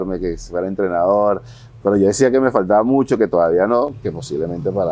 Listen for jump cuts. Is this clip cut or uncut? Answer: uncut